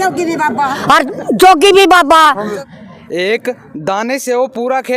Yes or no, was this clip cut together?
yes